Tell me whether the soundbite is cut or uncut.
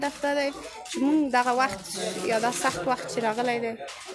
uncut